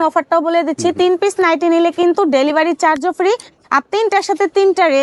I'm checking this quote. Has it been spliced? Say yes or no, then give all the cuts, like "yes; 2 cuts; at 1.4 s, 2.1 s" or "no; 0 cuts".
no; 0 cuts